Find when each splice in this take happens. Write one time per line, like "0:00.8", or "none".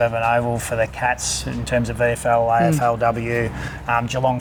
none